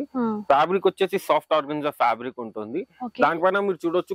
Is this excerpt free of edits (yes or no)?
yes